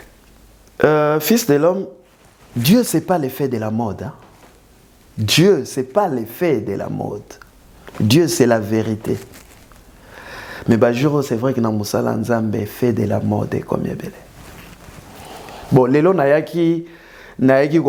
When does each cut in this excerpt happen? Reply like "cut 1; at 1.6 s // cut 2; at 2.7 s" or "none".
none